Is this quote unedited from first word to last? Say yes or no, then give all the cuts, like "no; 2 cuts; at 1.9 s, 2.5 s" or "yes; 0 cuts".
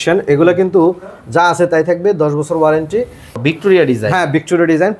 no; 1 cut; at 3.4 s